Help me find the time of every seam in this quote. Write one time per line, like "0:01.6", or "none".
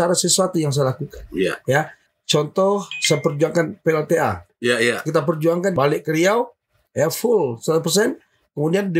0:02.0
0:04.5
0:05.7